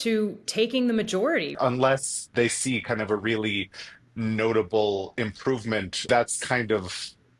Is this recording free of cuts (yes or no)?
no